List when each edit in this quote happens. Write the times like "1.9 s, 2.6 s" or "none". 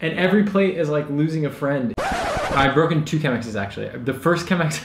2.5 s